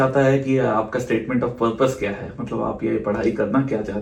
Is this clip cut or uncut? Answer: uncut